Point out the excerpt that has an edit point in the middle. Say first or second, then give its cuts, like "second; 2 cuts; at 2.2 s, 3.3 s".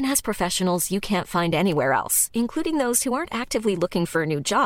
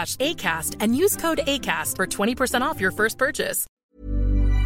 second; 1 cut; at 3.6 s